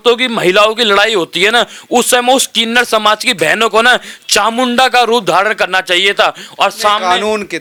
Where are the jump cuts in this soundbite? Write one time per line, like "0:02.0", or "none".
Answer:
none

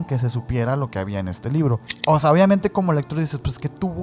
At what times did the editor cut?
0:01.9

